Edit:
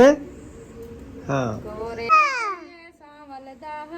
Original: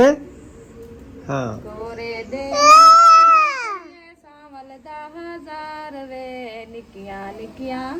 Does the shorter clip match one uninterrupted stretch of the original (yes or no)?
no